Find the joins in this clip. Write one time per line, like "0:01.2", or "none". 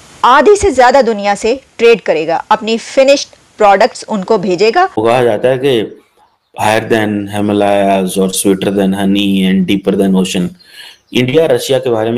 0:05.0